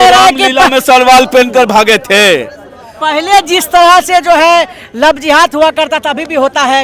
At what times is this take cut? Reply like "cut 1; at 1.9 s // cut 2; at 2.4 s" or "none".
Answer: none